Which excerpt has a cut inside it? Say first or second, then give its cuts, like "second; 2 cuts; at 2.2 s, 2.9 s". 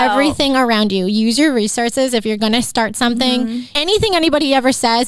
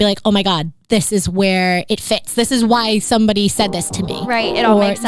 first; 1 cut; at 3.6 s